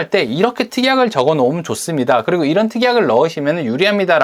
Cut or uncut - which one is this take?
uncut